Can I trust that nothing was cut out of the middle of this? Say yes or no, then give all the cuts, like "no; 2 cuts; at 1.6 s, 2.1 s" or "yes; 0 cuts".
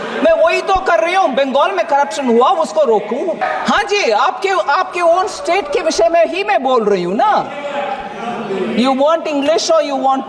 no; 1 cut; at 3.4 s